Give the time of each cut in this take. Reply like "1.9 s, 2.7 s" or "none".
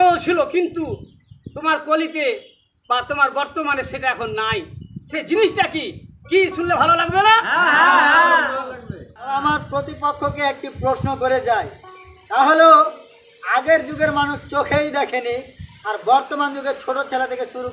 9.2 s